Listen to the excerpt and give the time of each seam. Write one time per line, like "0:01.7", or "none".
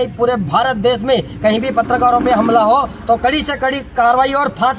none